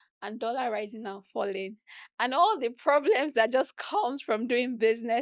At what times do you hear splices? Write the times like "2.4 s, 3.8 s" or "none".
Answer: none